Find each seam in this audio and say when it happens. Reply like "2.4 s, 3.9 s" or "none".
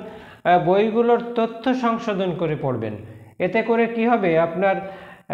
none